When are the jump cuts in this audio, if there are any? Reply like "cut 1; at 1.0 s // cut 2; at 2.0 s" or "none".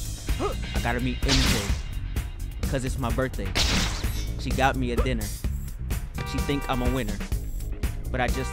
none